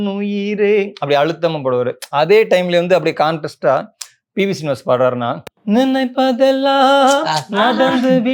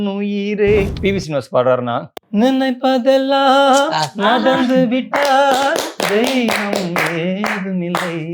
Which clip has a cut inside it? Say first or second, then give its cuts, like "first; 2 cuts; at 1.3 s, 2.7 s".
second; 1 cut; at 0.9 s